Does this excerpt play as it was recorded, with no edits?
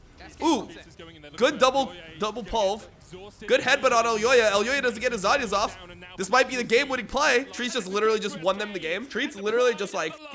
no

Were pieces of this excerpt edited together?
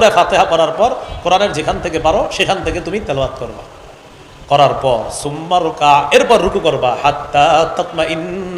no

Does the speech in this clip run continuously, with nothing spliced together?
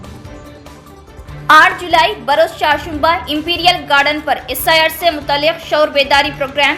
yes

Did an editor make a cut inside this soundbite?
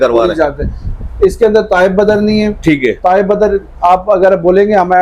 no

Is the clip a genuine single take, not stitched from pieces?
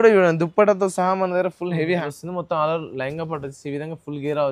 no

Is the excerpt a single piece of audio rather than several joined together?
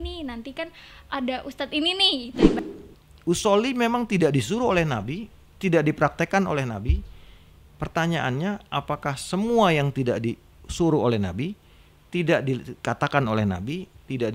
no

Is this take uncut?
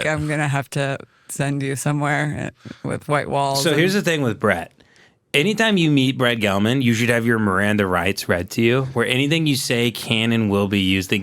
no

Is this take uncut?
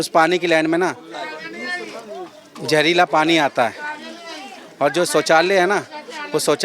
yes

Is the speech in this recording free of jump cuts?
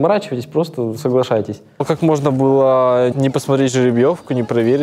no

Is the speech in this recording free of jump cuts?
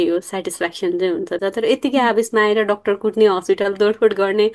no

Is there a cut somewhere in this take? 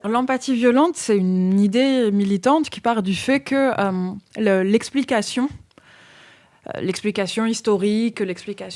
yes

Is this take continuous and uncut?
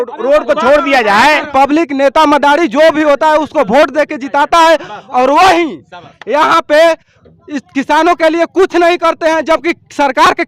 no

